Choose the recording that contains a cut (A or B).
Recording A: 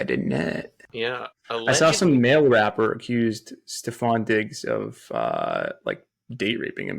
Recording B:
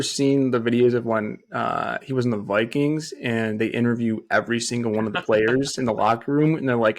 A